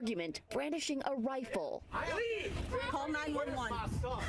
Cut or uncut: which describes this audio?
cut